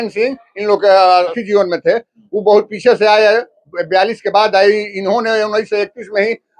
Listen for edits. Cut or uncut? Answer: cut